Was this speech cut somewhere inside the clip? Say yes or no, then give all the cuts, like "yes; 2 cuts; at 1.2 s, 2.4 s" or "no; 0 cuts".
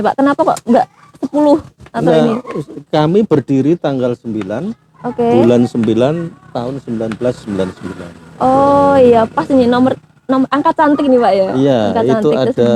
no; 0 cuts